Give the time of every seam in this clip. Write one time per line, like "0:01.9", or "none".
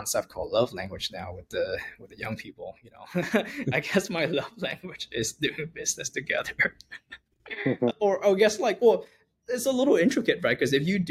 none